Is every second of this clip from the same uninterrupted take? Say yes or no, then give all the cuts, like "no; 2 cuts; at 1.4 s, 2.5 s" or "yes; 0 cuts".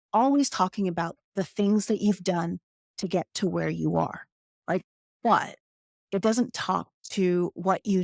no; 1 cut; at 4.8 s